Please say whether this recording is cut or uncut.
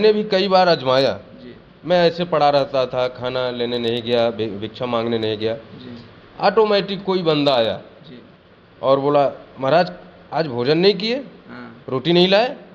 uncut